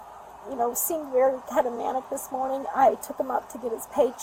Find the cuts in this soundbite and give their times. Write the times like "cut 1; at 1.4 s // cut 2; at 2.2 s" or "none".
none